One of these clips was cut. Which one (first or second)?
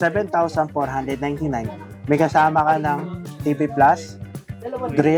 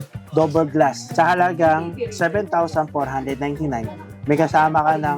second